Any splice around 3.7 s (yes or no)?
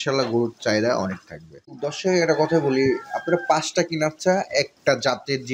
no